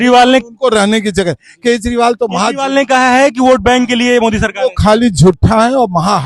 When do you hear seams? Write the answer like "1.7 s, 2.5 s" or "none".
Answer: none